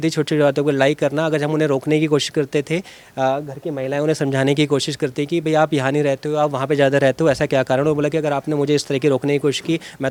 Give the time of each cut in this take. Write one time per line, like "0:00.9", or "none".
none